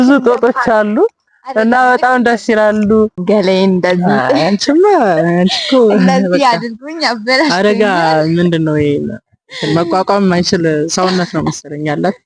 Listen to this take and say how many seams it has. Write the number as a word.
one